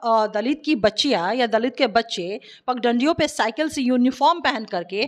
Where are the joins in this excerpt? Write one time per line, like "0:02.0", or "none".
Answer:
none

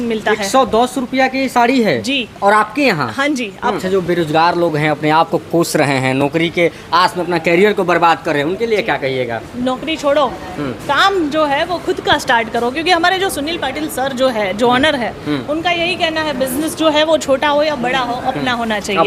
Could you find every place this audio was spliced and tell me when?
0:03.8

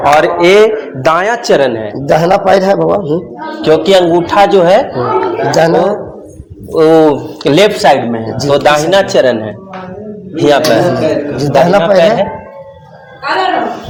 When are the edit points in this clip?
none

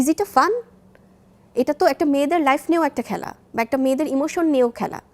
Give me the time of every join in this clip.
none

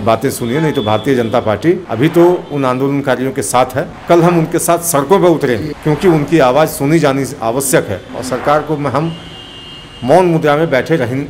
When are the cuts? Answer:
0:01.9
0:03.9
0:05.7

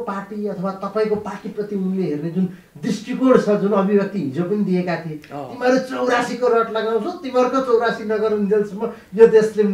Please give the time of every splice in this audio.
none

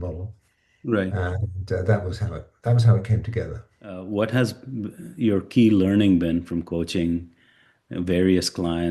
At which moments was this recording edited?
0:04.0

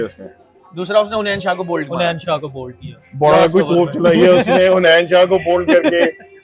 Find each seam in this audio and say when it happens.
none

